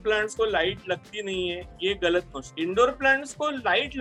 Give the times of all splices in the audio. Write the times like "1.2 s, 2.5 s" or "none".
none